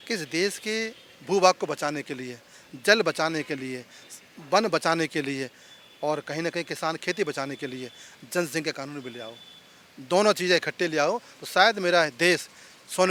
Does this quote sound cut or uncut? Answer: uncut